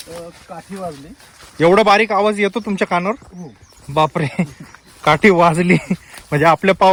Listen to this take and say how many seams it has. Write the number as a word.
zero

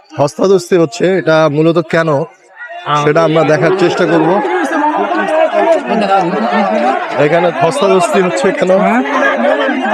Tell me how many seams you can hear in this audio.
zero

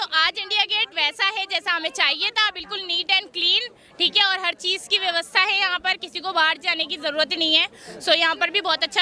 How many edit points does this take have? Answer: zero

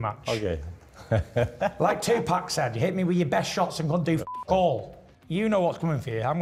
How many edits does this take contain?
zero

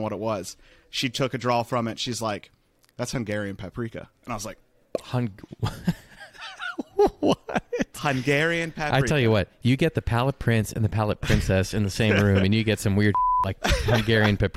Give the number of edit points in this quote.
zero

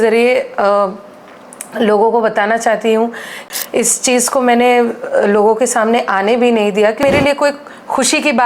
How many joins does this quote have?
two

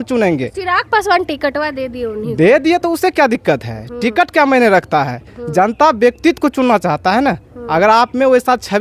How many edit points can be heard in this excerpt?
zero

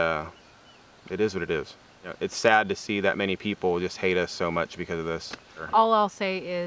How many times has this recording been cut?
two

